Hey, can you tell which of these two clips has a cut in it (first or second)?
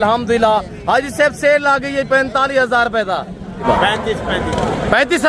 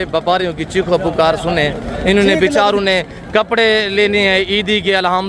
first